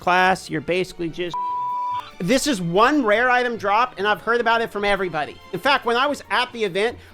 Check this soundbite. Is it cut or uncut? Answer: cut